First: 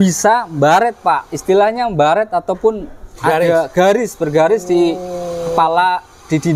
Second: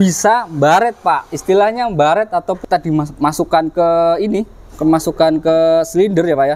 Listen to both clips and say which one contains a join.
second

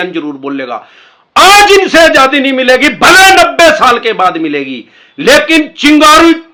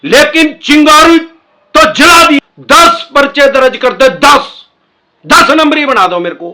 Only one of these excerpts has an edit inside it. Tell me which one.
second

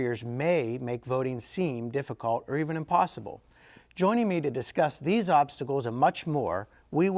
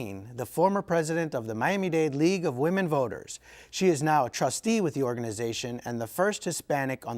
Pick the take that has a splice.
first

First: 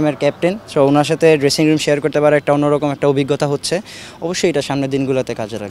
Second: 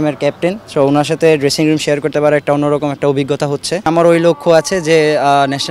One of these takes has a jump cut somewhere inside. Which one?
second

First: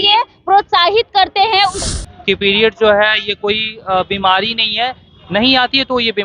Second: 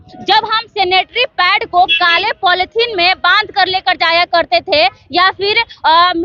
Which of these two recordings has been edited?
first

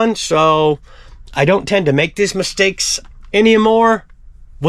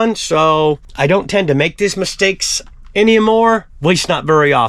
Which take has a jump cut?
second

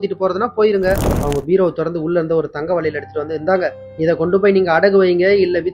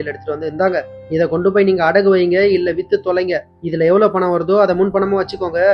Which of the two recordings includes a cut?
first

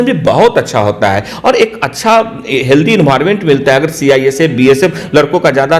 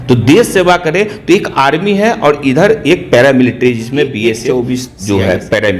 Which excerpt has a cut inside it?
second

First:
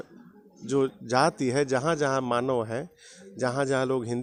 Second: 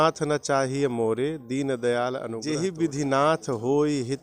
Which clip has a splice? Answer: second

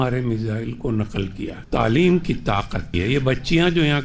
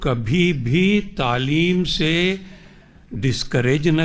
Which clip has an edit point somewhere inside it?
first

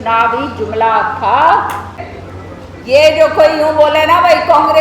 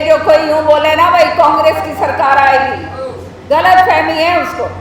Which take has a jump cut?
first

